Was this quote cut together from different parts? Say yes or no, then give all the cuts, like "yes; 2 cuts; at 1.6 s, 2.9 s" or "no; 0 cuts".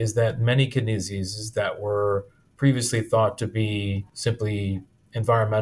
no; 0 cuts